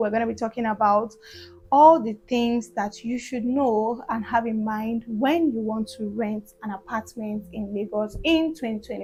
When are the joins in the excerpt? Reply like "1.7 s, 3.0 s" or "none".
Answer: none